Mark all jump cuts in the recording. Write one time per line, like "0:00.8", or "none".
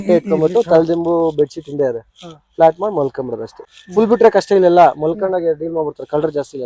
0:03.7